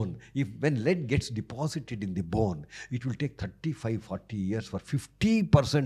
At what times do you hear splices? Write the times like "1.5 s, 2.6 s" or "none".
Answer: none